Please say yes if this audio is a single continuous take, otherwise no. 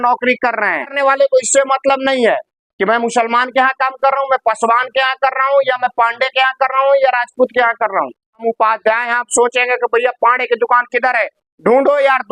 no